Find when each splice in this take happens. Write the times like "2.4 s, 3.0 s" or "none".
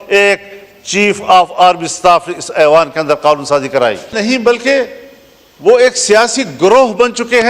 4.2 s